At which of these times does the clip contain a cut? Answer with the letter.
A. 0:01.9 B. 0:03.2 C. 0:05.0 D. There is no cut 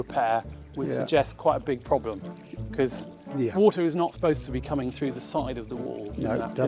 D